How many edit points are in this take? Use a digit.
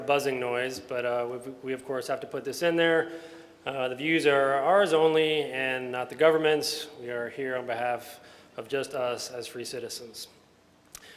1